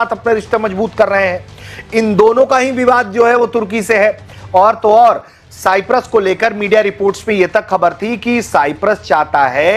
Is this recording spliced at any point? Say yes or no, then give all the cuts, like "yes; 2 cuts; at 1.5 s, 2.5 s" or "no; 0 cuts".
no; 0 cuts